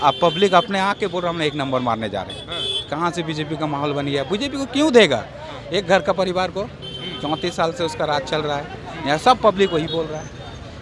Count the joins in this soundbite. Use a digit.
0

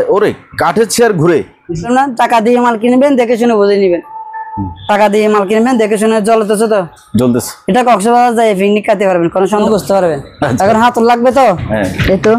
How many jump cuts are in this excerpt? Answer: 2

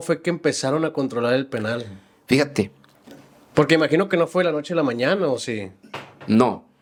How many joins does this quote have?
0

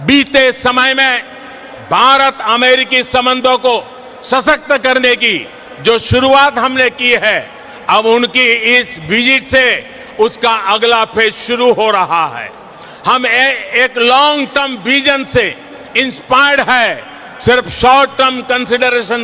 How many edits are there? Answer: 1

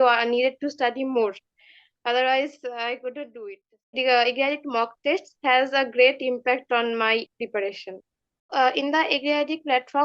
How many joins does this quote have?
2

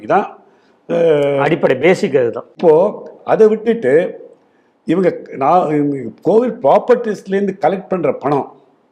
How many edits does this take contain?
1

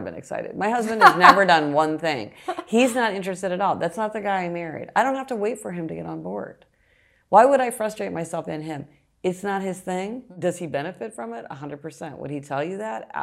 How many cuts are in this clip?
1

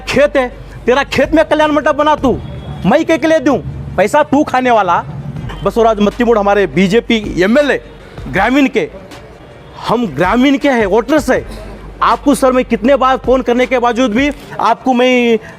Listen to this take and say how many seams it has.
1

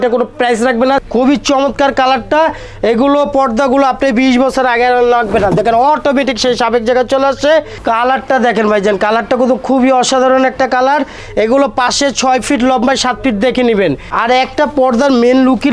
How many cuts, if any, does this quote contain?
4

